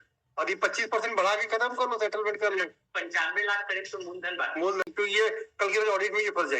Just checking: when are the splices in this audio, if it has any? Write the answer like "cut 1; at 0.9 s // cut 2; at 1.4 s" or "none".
cut 1; at 4.9 s